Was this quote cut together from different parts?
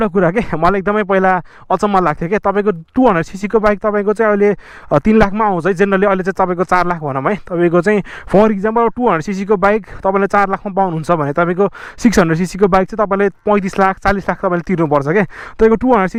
no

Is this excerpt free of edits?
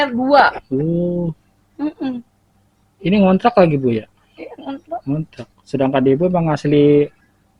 yes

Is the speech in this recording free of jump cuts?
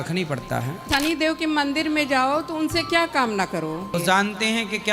no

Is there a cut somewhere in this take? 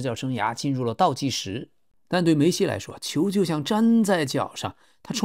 yes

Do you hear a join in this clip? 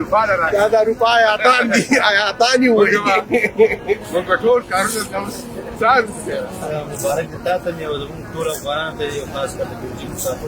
yes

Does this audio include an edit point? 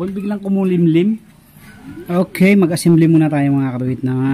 yes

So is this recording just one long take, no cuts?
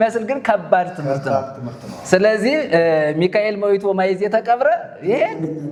yes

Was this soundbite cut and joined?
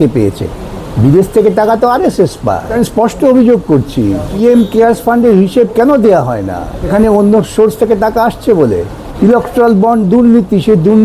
yes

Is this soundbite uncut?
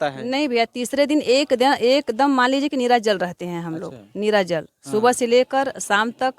yes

